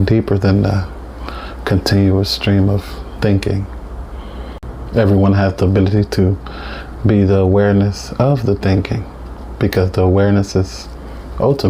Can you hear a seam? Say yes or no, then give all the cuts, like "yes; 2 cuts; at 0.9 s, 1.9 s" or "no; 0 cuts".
yes; 1 cut; at 4.6 s